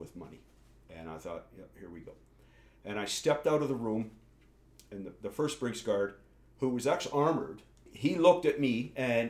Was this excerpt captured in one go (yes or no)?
no